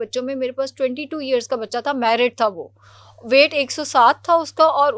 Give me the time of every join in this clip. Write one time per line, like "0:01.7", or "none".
none